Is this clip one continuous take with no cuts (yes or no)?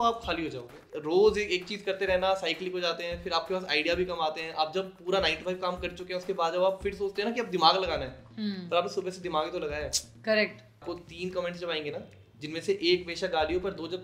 no